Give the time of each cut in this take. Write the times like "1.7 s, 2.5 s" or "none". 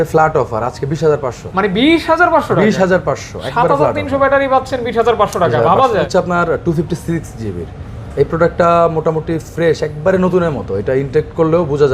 6.1 s